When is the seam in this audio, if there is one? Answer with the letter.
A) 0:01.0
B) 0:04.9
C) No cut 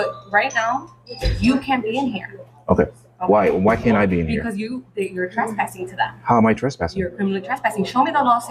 C